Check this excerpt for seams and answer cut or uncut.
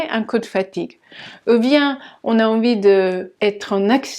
cut